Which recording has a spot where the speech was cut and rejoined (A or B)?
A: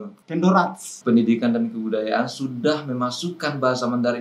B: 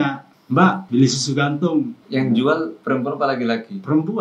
A